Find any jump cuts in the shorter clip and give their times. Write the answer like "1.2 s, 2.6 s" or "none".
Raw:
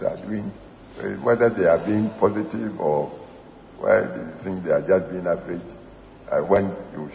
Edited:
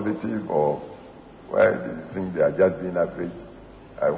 none